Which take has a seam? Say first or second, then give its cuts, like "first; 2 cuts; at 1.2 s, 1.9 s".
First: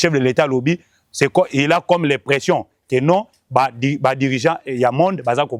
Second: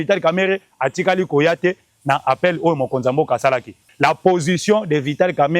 second; 1 cut; at 3.9 s